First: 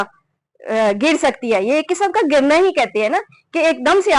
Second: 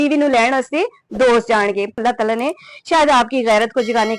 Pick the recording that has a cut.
second; 1 cut; at 2.0 s

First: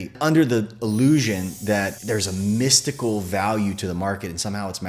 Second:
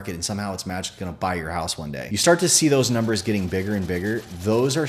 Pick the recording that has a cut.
second; 1 cut; at 2.0 s

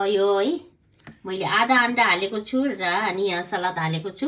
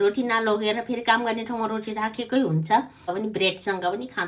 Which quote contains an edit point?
second; 1 cut; at 3.1 s

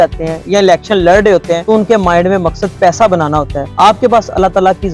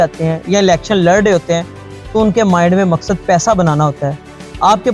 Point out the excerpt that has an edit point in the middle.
first; 2 cuts; at 1.6 s, 3.6 s

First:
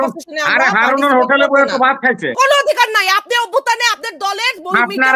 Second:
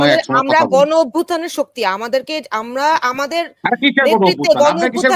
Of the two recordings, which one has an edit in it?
first; 1 cut; at 2.3 s

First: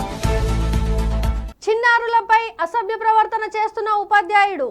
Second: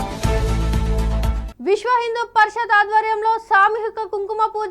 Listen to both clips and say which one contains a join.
second; 1 cut; at 1.4 s

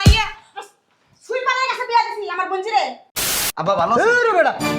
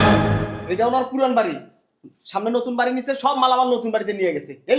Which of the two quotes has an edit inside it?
first; 1 cut; at 3.1 s

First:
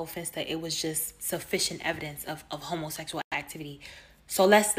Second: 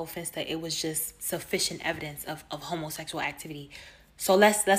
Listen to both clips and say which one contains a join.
second; 1 cut; at 3.2 s

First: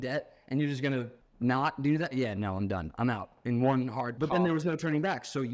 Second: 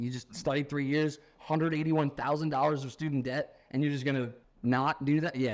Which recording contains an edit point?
first; 1 cut; at 4.1 s

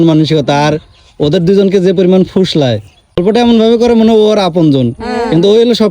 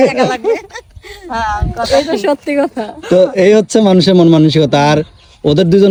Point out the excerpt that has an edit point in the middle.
first; 1 cut; at 3.0 s

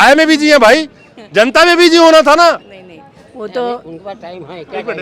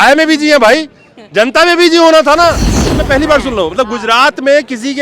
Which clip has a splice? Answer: second; 1 cut; at 3.0 s

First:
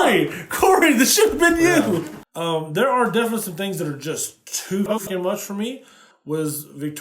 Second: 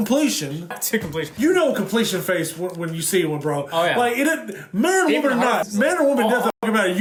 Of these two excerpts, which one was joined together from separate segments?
first; 1 cut; at 2.2 s

